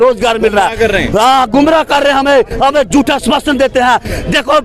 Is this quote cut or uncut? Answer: uncut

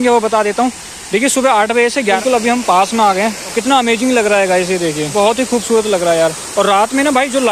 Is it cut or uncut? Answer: cut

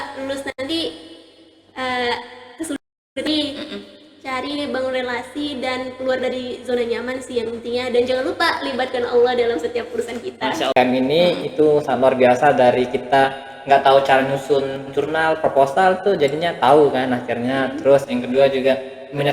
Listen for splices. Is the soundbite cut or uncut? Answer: cut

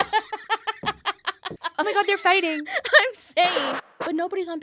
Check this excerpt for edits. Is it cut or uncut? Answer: cut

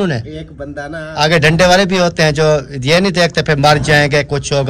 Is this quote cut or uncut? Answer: cut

